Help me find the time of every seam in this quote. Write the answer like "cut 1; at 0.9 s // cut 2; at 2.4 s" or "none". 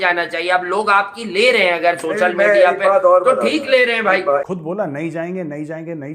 cut 1; at 4.4 s